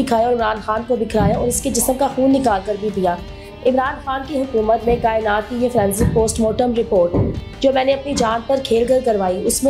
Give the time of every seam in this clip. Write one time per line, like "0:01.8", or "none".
none